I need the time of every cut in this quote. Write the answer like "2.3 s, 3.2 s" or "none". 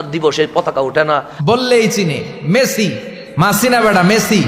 1.3 s